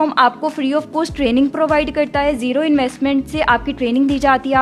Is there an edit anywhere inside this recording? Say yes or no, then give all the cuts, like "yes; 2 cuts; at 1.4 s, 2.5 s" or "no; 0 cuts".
no; 0 cuts